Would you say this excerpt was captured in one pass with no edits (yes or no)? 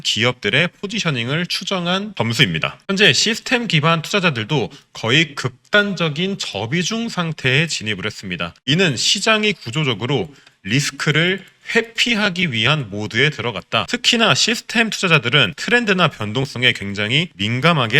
yes